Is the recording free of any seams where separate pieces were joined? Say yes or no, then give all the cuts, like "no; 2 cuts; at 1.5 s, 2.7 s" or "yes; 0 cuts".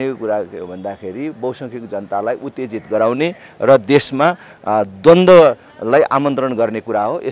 yes; 0 cuts